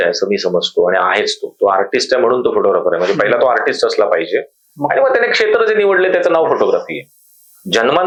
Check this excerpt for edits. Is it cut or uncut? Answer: uncut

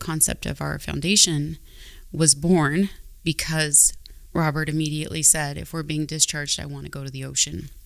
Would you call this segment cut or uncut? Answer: uncut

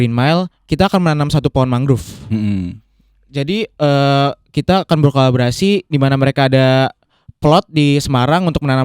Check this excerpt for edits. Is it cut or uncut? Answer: uncut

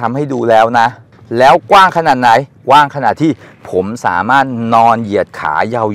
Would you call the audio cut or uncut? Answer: uncut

